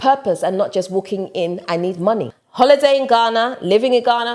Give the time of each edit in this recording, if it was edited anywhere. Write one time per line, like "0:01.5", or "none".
0:02.4